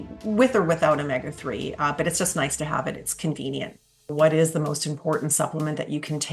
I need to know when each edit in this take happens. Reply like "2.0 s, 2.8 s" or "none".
4.1 s